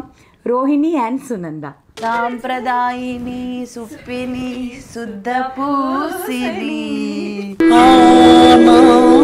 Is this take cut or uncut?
cut